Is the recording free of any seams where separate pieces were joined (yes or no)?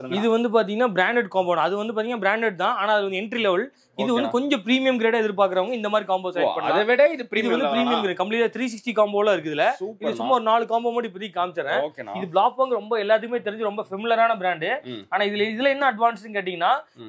yes